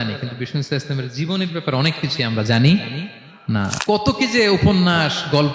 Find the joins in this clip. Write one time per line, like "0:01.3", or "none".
0:03.7